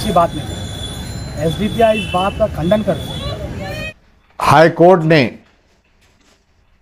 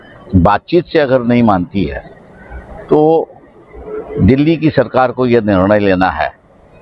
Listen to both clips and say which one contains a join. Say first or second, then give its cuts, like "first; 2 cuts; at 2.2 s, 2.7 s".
first; 1 cut; at 3.8 s